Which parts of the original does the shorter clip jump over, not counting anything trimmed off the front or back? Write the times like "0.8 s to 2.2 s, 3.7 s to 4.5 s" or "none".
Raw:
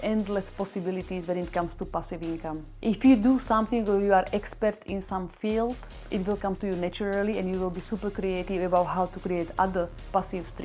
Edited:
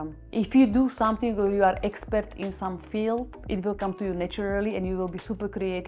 5.8 s to 6.0 s